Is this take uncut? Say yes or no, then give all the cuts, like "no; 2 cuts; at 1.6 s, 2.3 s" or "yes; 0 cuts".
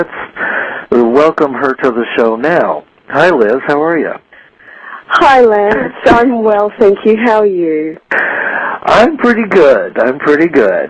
no; 1 cut; at 9.5 s